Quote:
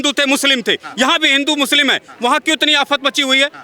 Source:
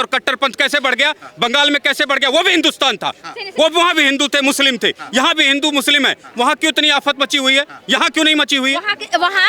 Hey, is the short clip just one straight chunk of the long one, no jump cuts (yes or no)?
yes